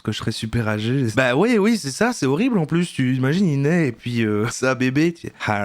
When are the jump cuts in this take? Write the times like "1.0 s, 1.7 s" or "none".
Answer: 1.1 s, 4.5 s